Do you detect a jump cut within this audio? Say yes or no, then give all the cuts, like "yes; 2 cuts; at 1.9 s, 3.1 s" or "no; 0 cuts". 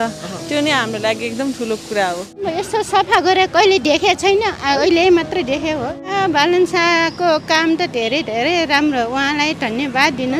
yes; 2 cuts; at 2.4 s, 6.1 s